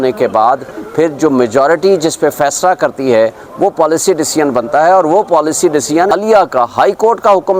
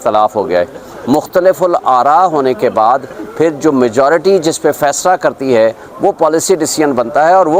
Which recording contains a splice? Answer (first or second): first